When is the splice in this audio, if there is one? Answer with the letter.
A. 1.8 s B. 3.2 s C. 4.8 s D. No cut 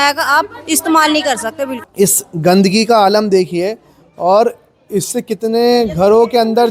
A